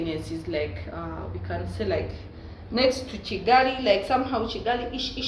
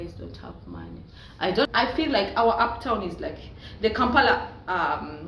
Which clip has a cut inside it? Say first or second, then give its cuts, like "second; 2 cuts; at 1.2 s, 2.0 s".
second; 1 cut; at 1.7 s